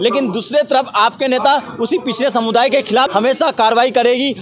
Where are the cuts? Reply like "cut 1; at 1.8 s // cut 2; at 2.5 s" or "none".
cut 1; at 3.1 s